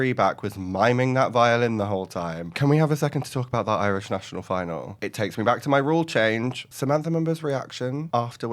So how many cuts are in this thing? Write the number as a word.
three